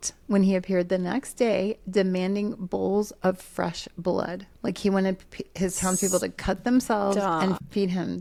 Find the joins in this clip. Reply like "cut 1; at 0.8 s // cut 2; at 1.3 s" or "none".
none